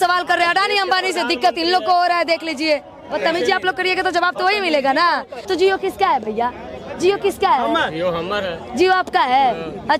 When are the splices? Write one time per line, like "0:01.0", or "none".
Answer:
0:03.1
0:05.4